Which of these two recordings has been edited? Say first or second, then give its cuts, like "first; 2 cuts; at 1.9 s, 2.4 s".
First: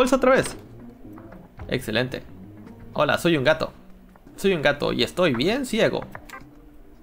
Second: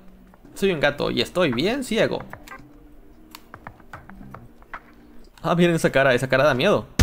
second; 1 cut; at 5.2 s